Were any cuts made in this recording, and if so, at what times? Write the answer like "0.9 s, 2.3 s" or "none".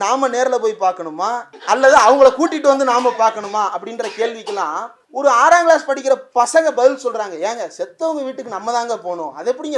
1.5 s, 5.0 s